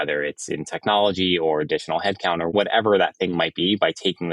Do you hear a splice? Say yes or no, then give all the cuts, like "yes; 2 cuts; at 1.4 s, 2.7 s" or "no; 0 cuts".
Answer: yes; 1 cut; at 2.5 s